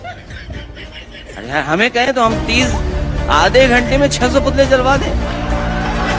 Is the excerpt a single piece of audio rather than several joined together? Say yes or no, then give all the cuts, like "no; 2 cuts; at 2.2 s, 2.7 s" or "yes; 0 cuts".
yes; 0 cuts